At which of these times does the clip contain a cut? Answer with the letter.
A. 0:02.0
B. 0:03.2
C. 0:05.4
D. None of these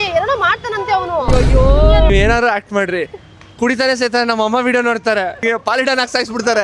C